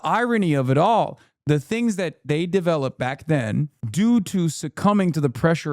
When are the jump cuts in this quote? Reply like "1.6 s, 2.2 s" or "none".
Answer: 1.3 s, 3.8 s